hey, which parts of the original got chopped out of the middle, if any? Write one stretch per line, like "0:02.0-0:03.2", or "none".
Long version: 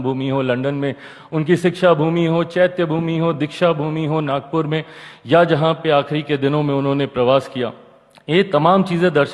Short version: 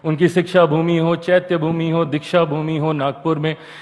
none